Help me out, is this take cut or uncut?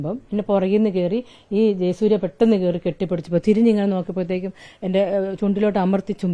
uncut